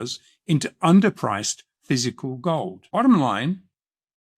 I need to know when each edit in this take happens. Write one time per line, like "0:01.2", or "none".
0:02.8